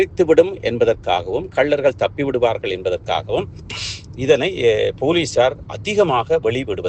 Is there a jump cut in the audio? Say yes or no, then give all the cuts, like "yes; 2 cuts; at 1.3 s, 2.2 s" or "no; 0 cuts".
no; 0 cuts